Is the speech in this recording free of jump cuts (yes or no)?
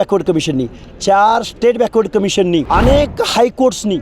no